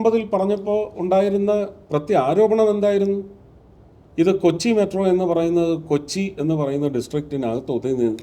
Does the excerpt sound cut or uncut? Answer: uncut